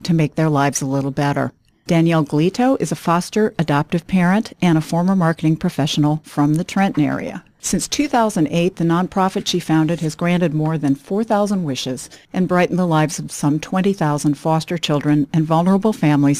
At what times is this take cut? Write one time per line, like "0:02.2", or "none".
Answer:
0:12.3